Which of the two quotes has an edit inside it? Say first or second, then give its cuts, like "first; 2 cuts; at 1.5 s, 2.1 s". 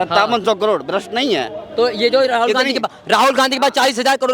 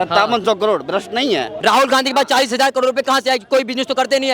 second; 1 cut; at 1.5 s